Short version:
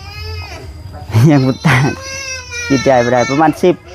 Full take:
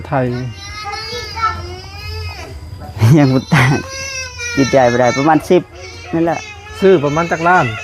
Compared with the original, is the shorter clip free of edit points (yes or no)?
yes